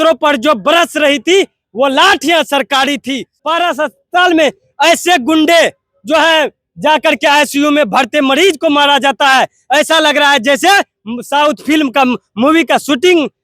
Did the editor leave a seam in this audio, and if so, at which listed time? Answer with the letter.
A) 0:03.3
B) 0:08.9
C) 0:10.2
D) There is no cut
A